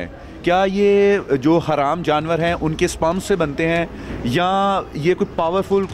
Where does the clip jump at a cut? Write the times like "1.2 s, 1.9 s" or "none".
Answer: none